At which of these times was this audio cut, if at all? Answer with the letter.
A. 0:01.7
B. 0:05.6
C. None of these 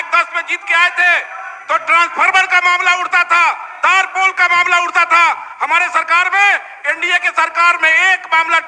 C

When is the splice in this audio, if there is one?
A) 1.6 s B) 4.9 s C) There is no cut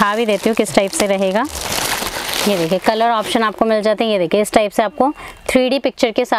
A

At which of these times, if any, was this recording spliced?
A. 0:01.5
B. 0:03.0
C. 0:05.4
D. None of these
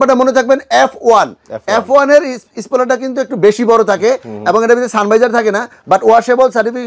D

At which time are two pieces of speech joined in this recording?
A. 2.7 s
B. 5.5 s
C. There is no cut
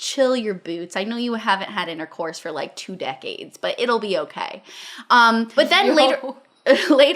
B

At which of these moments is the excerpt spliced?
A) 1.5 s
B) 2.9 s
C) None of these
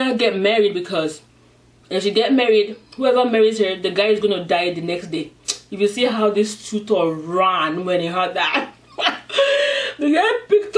C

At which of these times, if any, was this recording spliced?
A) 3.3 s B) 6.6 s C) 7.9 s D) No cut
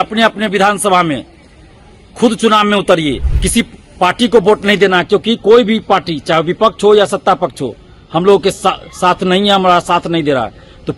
A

